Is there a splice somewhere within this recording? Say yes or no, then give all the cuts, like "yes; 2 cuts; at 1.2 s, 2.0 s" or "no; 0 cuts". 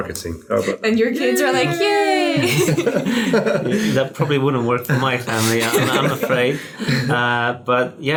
no; 0 cuts